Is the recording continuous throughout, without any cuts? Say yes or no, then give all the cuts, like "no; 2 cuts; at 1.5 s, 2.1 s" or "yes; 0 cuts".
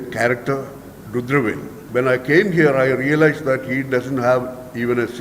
no; 1 cut; at 1.7 s